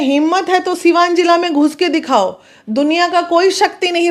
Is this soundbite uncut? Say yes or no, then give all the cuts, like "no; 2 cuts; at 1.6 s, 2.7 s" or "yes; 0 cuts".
yes; 0 cuts